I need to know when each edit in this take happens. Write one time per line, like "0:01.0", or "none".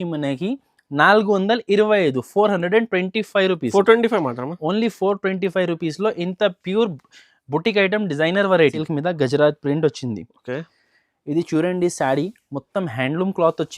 0:08.8